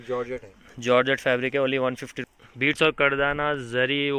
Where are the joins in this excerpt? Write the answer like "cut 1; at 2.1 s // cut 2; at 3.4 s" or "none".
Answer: cut 1; at 2.1 s